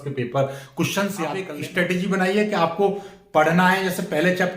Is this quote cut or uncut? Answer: cut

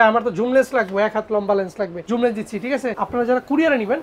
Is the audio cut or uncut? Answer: cut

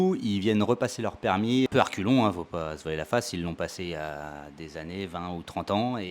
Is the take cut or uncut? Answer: cut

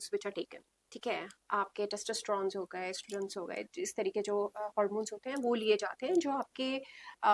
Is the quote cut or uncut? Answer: uncut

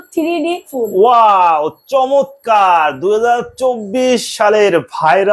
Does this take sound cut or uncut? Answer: uncut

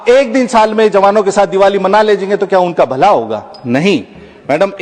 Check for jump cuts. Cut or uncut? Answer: uncut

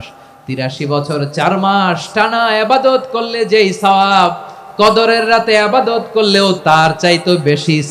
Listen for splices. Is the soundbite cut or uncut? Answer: cut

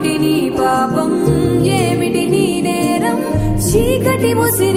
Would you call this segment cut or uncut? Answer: uncut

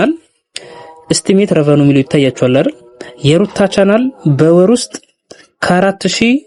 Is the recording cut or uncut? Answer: uncut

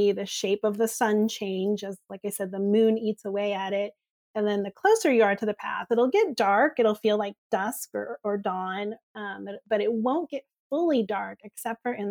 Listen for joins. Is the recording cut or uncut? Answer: uncut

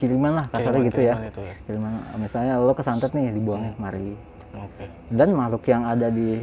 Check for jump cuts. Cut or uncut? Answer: uncut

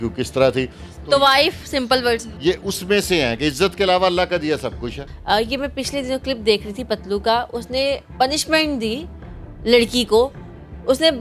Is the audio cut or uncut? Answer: cut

